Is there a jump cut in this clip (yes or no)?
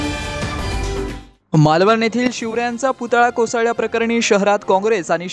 yes